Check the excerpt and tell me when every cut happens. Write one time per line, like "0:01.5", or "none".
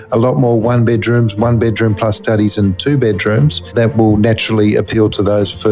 none